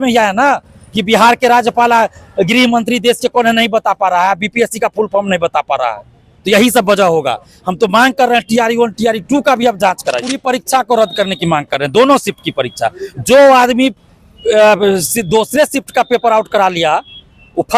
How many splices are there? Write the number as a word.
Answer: one